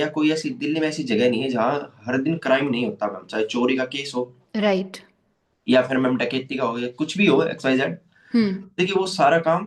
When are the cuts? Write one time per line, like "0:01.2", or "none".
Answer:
none